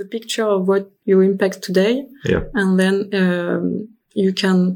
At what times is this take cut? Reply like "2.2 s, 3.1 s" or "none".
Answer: 0.9 s